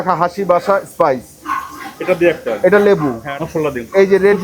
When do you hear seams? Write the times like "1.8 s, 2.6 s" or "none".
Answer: 3.2 s

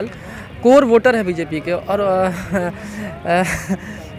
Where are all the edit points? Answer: none

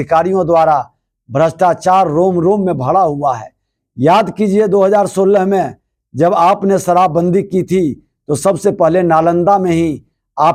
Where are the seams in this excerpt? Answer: none

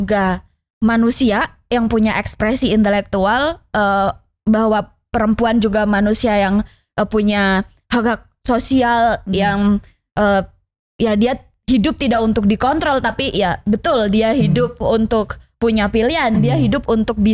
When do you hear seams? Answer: none

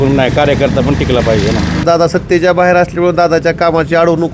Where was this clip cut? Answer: 1.8 s

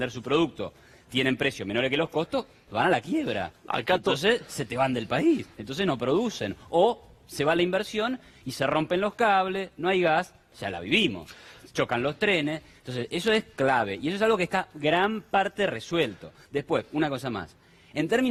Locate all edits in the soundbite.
none

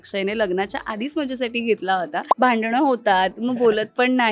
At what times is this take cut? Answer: 2.2 s

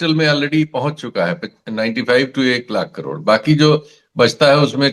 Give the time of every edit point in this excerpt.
none

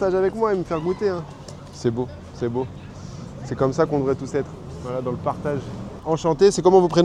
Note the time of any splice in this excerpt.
none

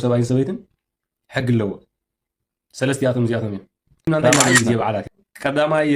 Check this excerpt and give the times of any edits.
5.0 s

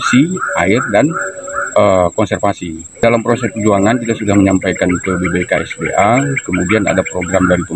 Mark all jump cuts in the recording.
3.0 s

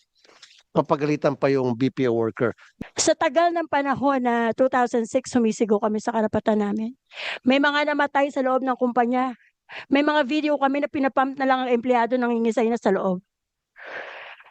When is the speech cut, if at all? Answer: 2.7 s

